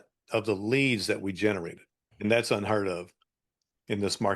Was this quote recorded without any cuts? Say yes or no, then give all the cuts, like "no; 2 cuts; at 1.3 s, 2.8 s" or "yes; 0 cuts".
no; 1 cut; at 2.1 s